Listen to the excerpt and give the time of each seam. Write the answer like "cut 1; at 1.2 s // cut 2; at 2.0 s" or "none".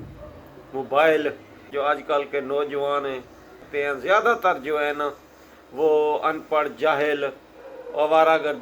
cut 1; at 1.7 s // cut 2; at 3.7 s